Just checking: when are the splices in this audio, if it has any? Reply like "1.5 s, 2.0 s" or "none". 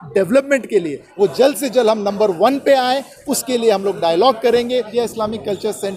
1.0 s, 4.9 s